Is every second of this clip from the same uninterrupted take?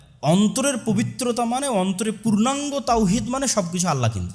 yes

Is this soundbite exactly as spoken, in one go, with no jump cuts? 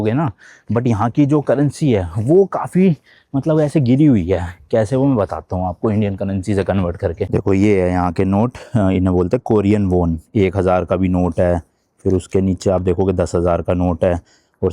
yes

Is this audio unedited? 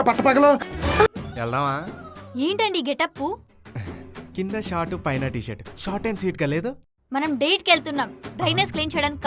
no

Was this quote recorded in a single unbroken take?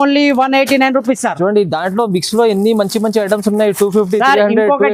yes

